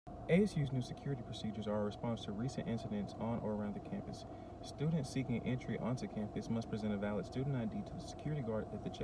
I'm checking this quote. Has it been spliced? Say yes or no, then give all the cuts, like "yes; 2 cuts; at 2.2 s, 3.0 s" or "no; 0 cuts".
no; 0 cuts